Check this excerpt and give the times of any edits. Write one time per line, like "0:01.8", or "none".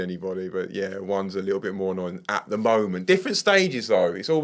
none